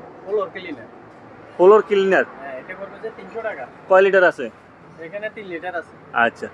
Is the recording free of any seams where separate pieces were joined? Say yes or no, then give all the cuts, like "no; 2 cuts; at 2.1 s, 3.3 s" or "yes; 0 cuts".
yes; 0 cuts